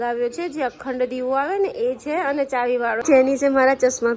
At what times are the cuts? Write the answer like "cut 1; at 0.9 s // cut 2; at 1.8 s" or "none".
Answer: cut 1; at 3.0 s